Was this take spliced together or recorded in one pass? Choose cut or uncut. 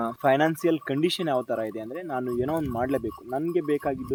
uncut